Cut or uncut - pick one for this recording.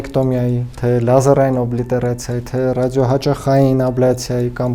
uncut